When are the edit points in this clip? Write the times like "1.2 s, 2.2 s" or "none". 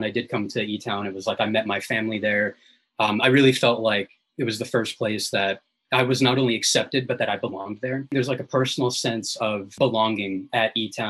8.1 s, 9.8 s